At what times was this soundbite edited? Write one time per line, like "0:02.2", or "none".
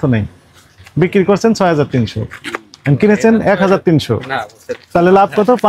none